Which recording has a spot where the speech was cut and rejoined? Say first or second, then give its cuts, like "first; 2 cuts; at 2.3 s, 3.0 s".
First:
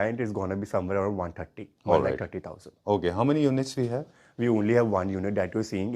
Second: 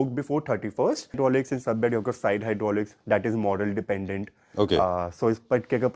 second; 1 cut; at 1.2 s